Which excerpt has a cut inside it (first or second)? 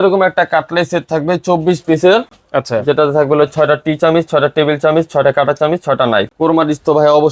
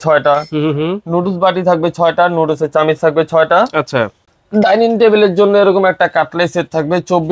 first